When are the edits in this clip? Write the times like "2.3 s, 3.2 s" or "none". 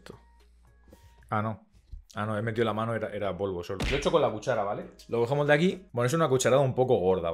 5.8 s

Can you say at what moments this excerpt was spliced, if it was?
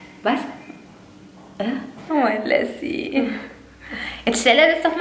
2.0 s

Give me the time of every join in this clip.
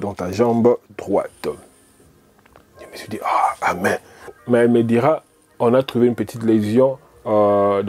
none

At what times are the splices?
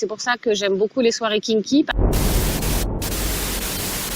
1.9 s

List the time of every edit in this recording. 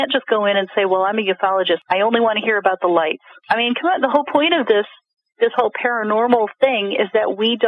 1.8 s, 3.3 s

